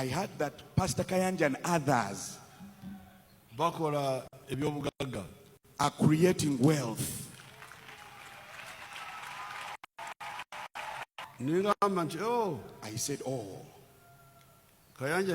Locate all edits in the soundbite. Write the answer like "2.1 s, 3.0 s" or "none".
11.3 s